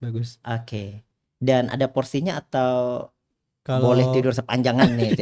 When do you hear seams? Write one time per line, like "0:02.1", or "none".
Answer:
none